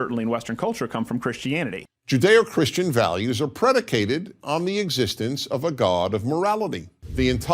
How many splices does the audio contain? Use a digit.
1